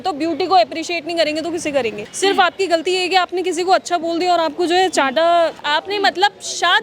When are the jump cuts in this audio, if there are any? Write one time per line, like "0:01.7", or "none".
0:02.0
0:05.6